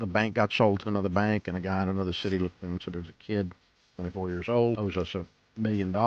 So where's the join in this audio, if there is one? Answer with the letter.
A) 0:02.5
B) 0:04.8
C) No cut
B